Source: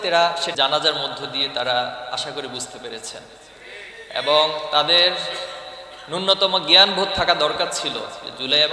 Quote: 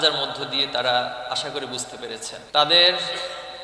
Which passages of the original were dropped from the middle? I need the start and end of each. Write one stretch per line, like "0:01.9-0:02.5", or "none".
0:03.3-0:04.7